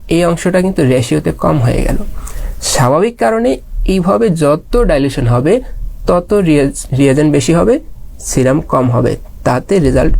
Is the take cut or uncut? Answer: uncut